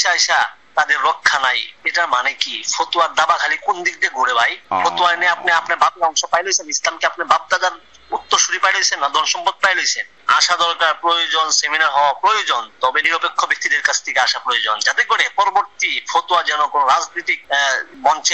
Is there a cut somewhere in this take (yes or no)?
yes